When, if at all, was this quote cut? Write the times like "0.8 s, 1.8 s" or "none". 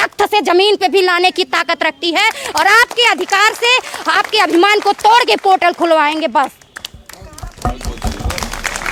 none

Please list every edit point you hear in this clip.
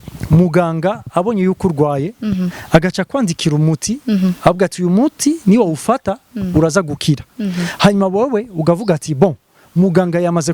none

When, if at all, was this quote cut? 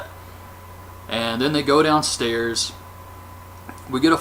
none

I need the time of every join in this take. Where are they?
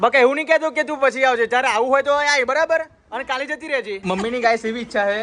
4.0 s

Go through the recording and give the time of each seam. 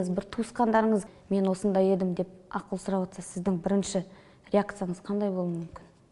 1.0 s

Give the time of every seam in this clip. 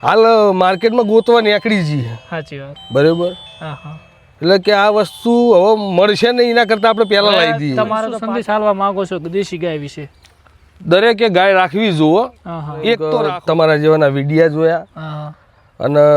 8.1 s, 13.1 s

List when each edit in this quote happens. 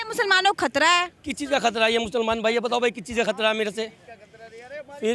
none

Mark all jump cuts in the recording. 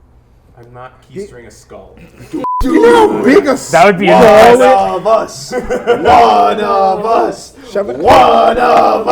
2.4 s

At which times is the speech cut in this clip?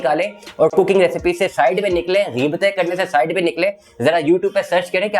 none

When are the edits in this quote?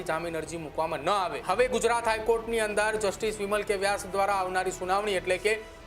1.4 s

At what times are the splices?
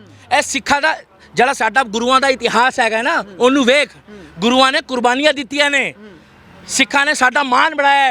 none

